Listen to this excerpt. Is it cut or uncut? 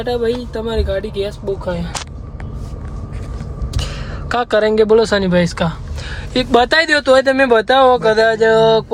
uncut